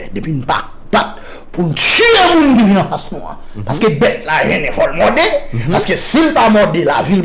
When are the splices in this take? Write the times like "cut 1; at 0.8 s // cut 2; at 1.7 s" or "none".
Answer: cut 1; at 2.2 s

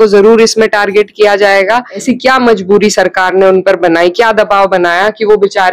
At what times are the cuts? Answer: cut 1; at 2.0 s

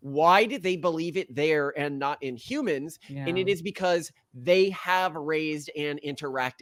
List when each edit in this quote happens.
none

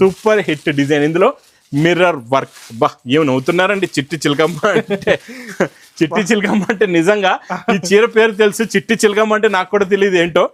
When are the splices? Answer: none

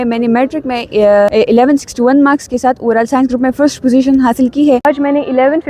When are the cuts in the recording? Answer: cut 1; at 1.3 s // cut 2; at 4.8 s

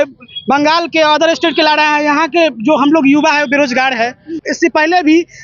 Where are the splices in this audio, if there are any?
cut 1; at 4.4 s

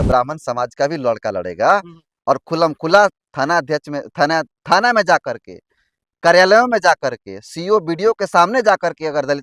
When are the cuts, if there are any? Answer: none

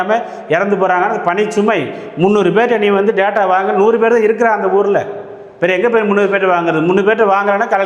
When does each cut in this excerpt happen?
none

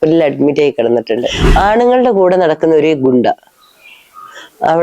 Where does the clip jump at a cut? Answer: cut 1; at 1.4 s

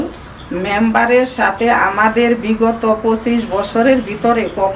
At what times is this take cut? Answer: none

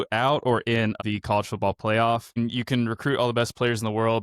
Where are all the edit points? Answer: cut 1; at 1.0 s // cut 2; at 2.4 s

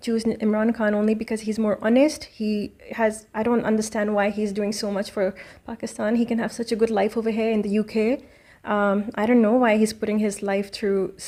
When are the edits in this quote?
none

